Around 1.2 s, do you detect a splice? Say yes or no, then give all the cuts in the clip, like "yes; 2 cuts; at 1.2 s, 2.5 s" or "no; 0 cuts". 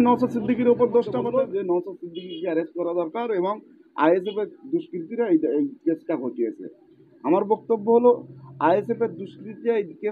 yes; 1 cut; at 1.2 s